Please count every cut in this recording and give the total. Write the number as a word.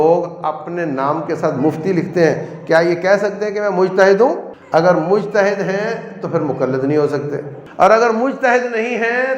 two